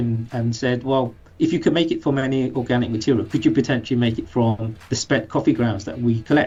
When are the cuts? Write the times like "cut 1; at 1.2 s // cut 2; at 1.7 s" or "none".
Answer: none